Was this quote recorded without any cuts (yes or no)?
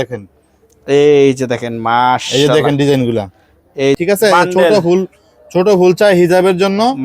no